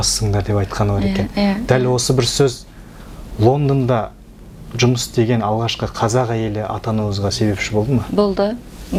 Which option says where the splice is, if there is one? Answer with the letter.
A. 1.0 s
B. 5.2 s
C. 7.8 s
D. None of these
D